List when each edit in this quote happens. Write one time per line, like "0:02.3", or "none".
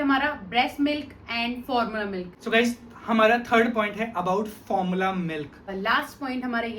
0:02.3
0:05.7